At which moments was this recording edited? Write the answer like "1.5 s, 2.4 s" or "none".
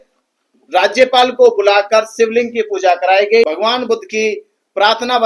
3.4 s